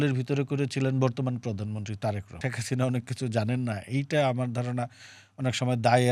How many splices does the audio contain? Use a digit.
1